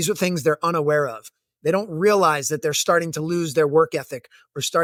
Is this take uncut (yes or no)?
yes